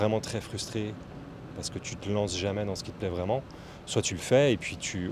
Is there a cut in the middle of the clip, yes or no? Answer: no